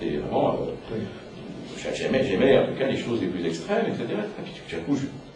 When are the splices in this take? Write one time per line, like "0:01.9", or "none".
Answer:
0:04.4

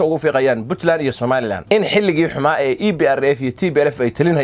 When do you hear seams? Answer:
0:01.6

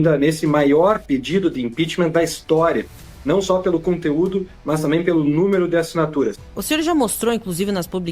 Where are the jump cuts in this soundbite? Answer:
0:06.4

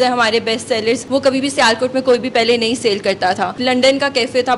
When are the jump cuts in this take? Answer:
0:01.0
0:03.6

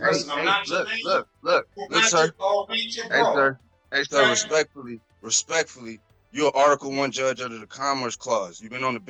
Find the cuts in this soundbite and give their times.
none

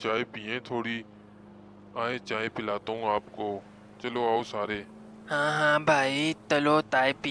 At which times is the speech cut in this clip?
none

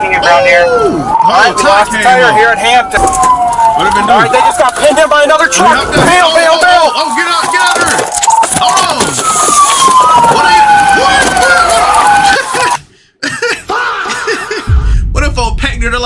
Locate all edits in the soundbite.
0:03.0

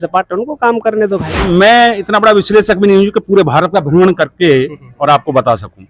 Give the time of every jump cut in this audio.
0:01.3

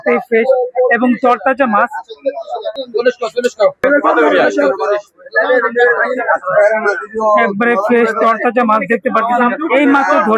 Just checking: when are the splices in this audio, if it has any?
none

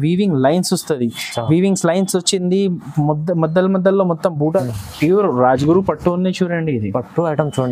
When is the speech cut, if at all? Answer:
0:04.6

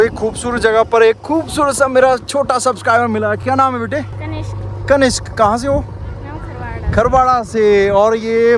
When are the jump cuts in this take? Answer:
none

